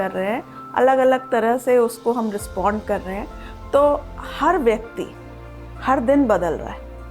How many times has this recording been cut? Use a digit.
0